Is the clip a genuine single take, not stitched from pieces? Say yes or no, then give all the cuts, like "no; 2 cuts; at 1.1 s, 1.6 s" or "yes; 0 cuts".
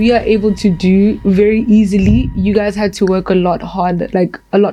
yes; 0 cuts